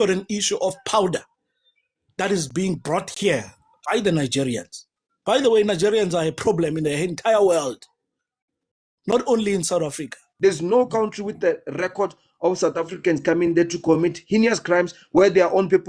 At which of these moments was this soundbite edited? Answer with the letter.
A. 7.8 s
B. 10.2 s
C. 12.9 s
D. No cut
B